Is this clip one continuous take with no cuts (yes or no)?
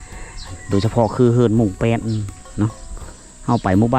yes